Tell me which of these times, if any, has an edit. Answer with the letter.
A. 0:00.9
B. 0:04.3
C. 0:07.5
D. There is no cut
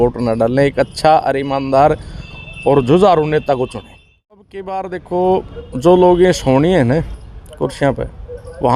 B